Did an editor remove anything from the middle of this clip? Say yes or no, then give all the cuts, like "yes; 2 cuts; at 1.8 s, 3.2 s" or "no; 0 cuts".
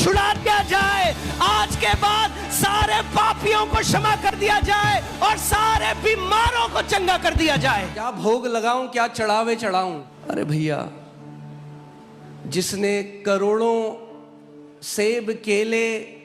yes; 2 cuts; at 8.0 s, 10.1 s